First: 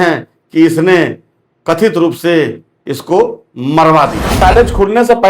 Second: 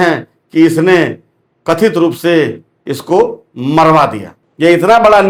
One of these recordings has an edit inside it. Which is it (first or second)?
first